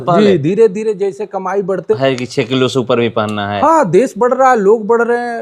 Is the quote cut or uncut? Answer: cut